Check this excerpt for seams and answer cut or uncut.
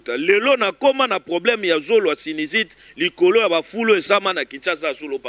uncut